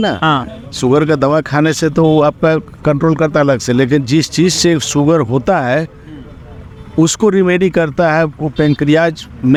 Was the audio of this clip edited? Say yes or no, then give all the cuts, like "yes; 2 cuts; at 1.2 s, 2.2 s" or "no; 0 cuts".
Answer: no; 0 cuts